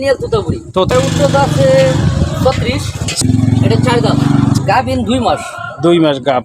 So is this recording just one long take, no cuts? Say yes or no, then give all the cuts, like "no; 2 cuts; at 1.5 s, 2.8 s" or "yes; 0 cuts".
no; 3 cuts; at 0.9 s, 3.2 s, 4.6 s